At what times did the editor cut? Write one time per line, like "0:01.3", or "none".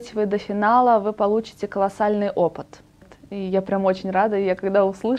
0:03.0